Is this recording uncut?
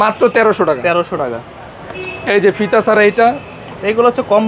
yes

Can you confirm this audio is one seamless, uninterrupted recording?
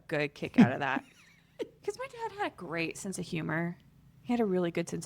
no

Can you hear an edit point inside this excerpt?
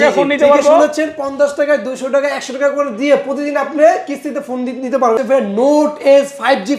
yes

